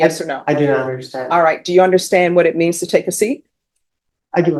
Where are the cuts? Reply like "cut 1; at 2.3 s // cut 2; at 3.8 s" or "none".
none